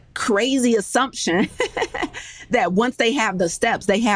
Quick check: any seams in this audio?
no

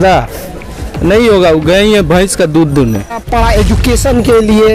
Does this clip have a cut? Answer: yes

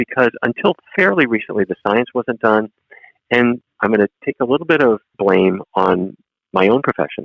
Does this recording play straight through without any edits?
no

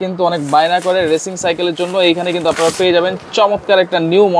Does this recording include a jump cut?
no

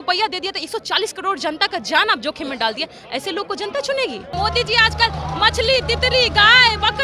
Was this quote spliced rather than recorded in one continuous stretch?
yes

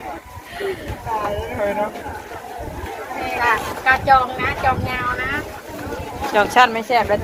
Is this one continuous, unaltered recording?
yes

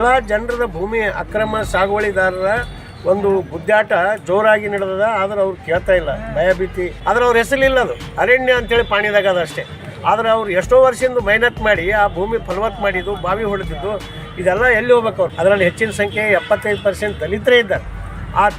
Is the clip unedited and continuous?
no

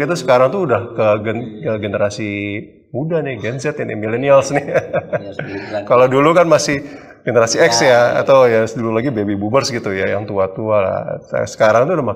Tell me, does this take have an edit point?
no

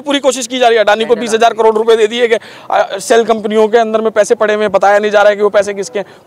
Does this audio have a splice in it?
no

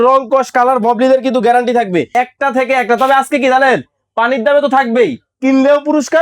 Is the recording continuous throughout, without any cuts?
no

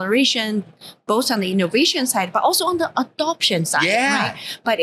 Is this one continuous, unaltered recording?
yes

